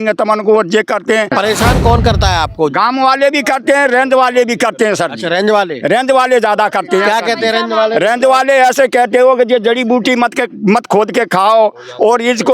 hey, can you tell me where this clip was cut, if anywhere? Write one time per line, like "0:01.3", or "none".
0:01.3